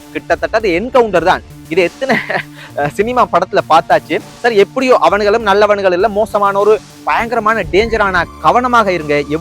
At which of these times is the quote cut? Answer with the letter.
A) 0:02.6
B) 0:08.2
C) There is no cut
B